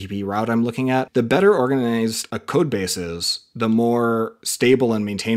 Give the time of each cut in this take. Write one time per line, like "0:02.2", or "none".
0:01.1
0:02.3
0:04.4